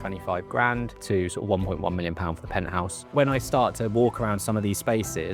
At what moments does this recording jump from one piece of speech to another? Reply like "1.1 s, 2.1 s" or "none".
1.0 s, 3.0 s